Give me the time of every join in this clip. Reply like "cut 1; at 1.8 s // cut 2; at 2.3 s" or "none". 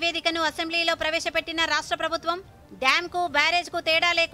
none